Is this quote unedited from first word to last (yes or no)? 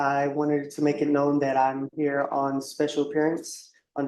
yes